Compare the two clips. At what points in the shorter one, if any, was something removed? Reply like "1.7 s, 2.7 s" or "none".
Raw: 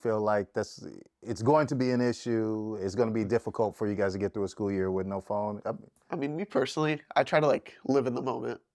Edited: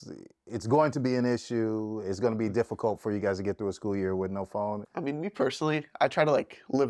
4.8 s